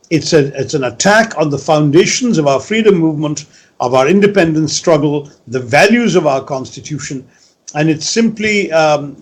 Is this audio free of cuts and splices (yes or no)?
yes